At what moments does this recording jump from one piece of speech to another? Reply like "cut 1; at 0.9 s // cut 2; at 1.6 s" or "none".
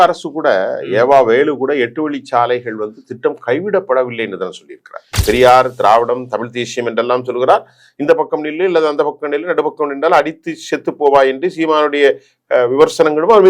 cut 1; at 5.2 s